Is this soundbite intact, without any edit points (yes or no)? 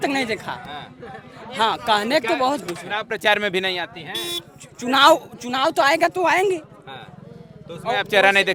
yes